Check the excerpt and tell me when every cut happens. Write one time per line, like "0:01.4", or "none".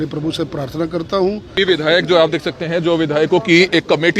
0:01.6